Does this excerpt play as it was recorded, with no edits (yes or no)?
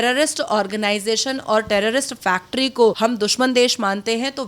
no